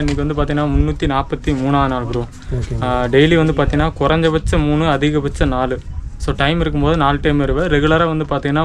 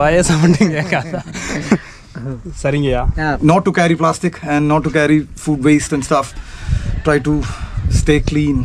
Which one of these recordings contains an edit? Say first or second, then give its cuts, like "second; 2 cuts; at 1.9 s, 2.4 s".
second; 1 cut; at 3.3 s